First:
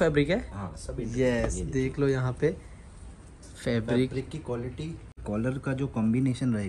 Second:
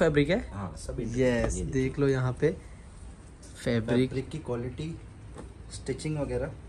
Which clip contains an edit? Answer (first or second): first